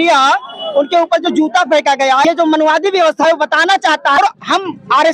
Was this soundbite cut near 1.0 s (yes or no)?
no